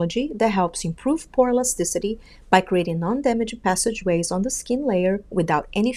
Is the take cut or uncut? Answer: uncut